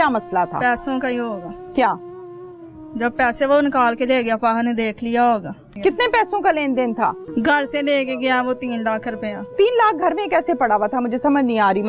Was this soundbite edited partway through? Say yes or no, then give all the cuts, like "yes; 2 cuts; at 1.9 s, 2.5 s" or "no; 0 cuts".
yes; 2 cuts; at 5.6 s, 7.2 s